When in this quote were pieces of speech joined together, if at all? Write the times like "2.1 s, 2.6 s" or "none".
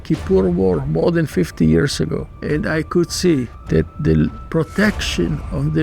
2.3 s, 3.6 s

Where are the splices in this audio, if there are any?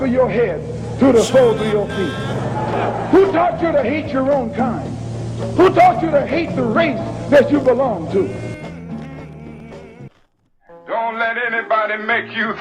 10.1 s

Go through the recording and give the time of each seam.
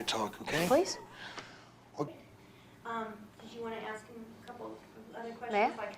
2.1 s

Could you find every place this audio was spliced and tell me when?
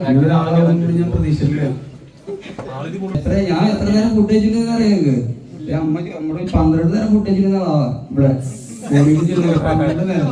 3.2 s

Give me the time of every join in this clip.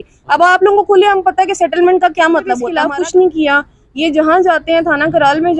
2.7 s

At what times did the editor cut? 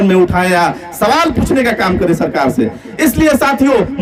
none

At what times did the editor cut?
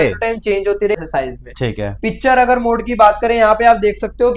1.0 s

